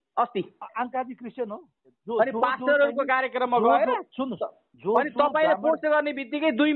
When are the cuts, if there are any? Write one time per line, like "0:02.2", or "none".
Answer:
0:01.9